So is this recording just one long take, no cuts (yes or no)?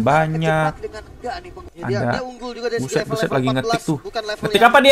no